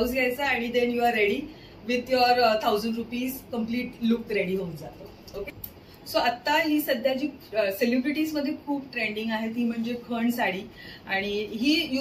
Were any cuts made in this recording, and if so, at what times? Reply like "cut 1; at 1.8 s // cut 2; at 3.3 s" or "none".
cut 1; at 5.6 s